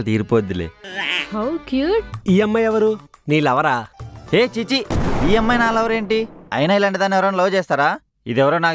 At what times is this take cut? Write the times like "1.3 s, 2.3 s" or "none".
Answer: 2.1 s